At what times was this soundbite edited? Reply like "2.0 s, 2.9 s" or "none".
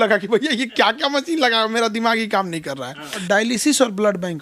3.2 s